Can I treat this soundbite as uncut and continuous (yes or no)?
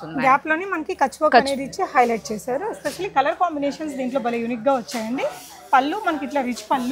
yes